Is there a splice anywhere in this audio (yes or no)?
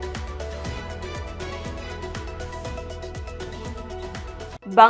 no